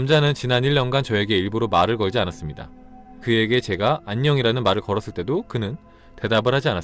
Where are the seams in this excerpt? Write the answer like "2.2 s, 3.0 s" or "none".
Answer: 3.1 s